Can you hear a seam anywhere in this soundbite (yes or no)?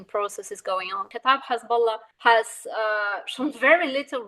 yes